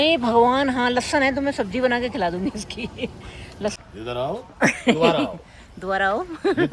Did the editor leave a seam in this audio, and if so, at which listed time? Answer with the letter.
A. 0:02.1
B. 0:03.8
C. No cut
B